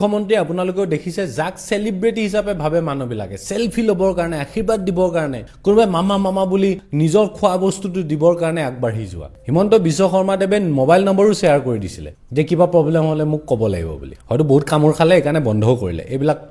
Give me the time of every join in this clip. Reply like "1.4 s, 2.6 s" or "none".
9.3 s